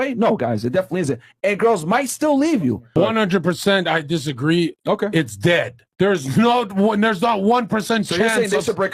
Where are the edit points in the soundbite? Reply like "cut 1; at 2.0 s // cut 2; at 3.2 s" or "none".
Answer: cut 1; at 2.9 s